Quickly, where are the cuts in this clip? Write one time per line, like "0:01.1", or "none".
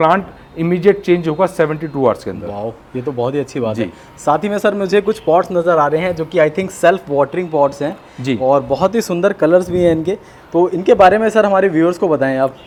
none

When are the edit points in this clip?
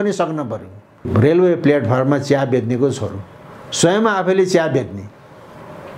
0:01.1

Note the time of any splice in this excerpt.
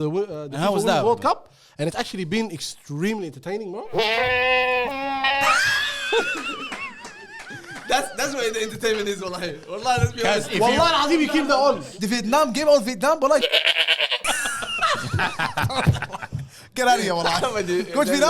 0:03.9
0:11.9

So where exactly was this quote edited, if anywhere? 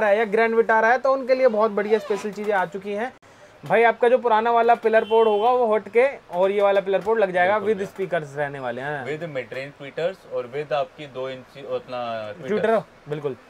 none

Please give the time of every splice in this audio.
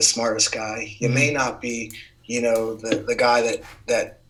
none

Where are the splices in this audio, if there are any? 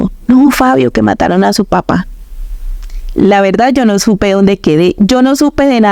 none

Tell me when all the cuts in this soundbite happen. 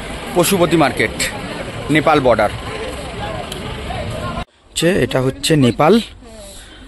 0:04.6

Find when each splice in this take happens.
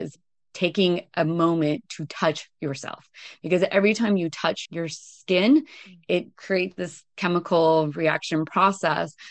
0:06.5

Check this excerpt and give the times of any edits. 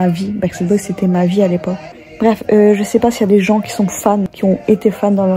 0:01.8
0:04.3

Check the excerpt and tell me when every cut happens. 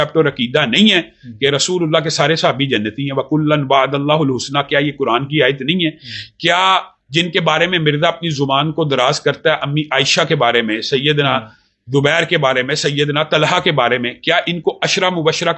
none

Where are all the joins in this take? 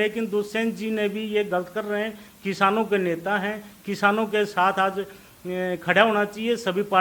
none

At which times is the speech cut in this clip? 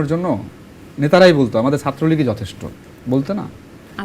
none

